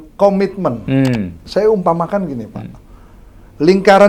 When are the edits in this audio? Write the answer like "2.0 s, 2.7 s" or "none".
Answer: 1.4 s